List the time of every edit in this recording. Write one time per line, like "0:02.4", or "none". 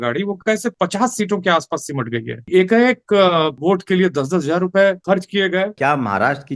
0:00.7
0:02.5
0:03.6
0:05.6

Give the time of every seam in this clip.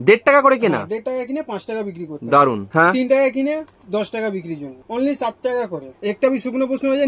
0:02.6
0:04.7
0:05.9

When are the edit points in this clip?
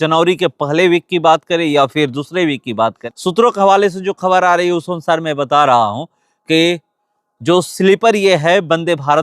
0:03.0

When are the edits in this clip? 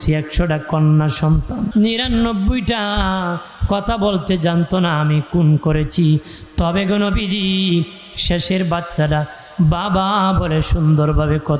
0:01.7

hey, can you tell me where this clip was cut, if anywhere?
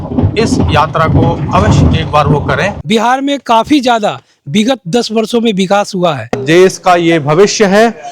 0:02.8
0:06.3

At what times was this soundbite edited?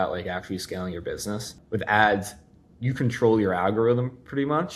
0:01.5

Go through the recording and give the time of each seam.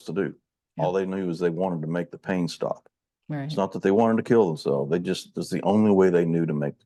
none

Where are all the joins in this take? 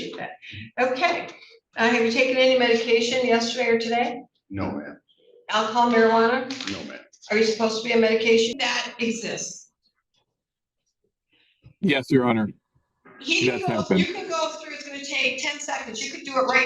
0:08.5

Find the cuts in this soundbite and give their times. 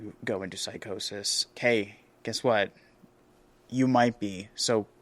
0:01.5

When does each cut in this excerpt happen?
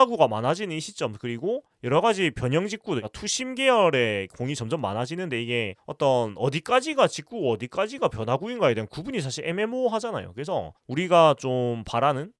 0:10.8

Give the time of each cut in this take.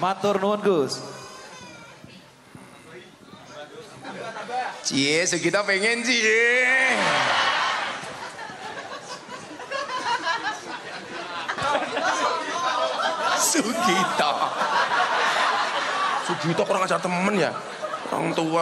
0:11.6

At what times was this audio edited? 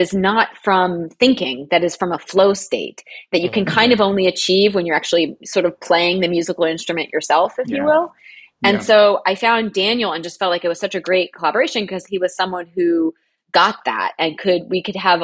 none

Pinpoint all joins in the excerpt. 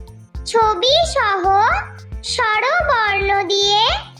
none

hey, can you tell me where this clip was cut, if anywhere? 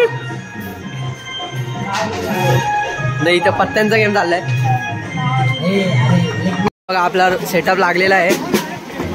0:06.7

